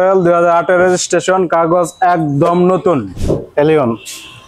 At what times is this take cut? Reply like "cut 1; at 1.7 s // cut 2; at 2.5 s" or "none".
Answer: cut 1; at 3.1 s